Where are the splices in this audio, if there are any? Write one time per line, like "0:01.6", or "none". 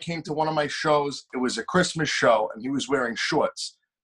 0:01.3